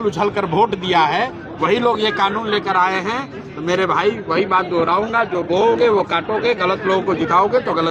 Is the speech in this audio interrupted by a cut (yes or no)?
no